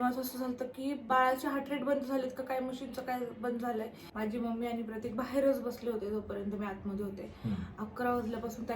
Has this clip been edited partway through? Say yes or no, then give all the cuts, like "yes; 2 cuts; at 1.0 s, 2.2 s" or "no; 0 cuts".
yes; 2 cuts; at 1.1 s, 4.0 s